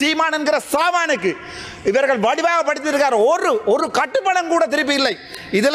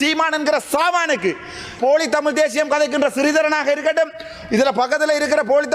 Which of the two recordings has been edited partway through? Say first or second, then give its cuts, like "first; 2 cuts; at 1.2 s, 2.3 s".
second; 1 cut; at 1.8 s